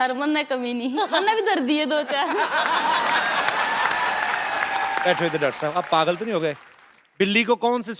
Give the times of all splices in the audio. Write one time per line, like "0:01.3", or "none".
0:00.9
0:05.0